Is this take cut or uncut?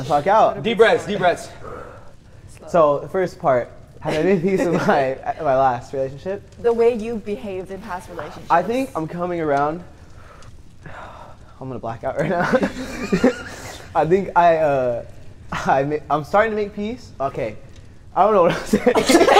uncut